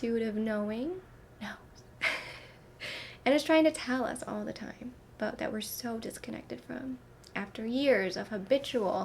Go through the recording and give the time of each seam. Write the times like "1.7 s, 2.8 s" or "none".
1.2 s